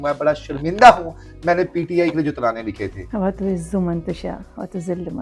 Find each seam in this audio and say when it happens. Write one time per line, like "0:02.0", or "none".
0:02.9